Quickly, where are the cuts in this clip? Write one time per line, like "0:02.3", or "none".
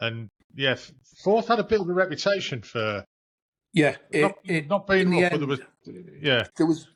none

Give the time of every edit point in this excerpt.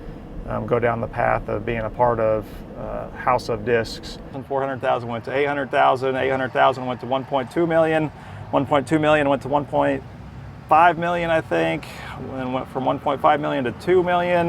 0:04.4

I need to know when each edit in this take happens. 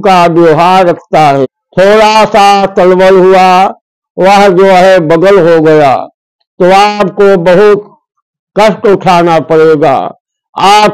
0:01.6

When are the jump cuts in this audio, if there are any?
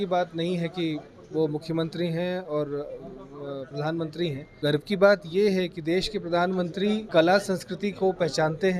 0:04.5
0:07.1

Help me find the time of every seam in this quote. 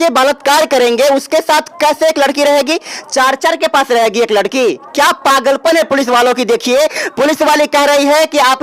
none

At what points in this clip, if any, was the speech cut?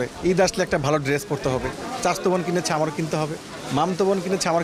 none

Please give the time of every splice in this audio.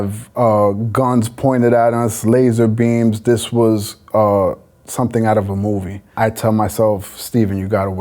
0:06.0

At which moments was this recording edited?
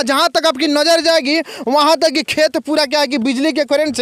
none

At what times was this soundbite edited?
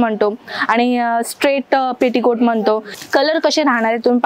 0:02.9

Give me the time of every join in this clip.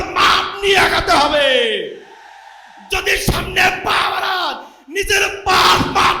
none

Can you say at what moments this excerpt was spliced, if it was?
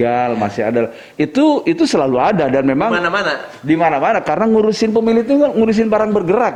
none

